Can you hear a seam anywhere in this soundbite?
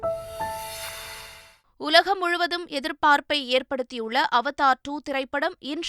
no; 0 cuts

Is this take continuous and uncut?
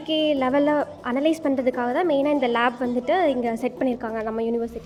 yes; 0 cuts

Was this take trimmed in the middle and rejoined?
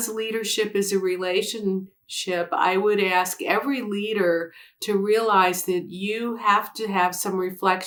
no; 0 cuts

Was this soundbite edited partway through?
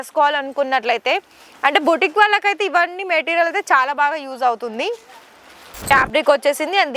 yes; 1 cut; at 5.9 s

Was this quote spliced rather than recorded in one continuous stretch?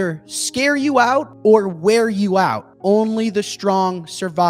yes; 2 cuts; at 1.3 s, 2.7 s

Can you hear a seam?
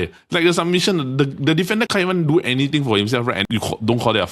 yes; 2 cuts; at 1.9 s, 3.4 s

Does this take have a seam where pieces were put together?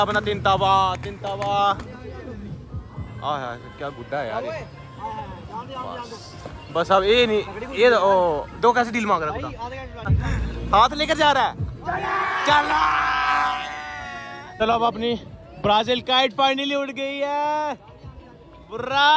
yes; 2 cuts; at 10.0 s, 14.5 s

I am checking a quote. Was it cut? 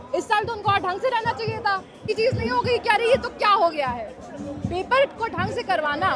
yes; 1 cut; at 2.1 s

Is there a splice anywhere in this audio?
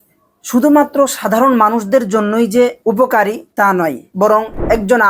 no; 0 cuts

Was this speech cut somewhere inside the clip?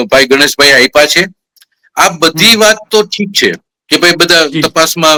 no; 0 cuts

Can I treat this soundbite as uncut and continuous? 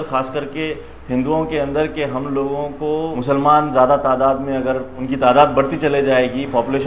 no; 2 cuts; at 3.1 s, 5.0 s

